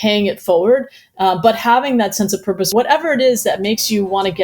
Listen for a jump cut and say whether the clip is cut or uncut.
cut